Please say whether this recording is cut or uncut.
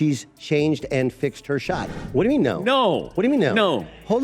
cut